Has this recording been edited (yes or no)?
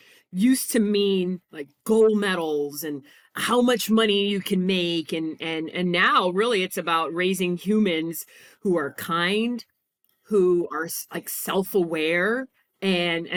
no